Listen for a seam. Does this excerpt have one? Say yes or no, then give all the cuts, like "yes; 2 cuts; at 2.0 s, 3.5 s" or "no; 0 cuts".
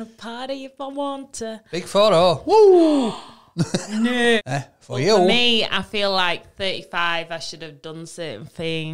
yes; 1 cut; at 4.4 s